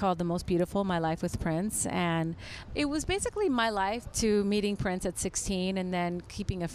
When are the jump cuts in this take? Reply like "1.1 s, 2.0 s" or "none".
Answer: 2.6 s, 4.1 s